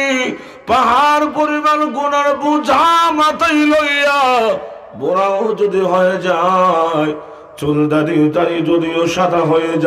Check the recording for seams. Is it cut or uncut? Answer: uncut